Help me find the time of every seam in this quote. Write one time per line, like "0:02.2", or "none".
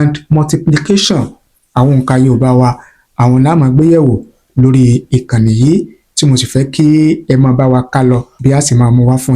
0:08.3